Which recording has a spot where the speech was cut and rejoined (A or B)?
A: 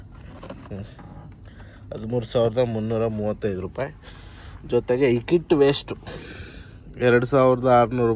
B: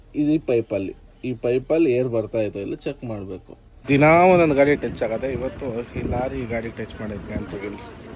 B